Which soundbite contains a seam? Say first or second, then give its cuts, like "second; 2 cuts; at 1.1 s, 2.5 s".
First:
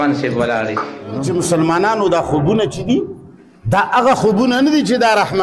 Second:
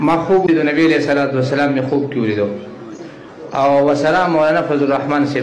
first; 1 cut; at 1.3 s